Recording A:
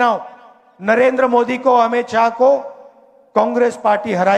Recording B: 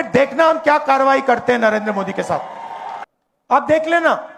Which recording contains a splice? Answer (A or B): B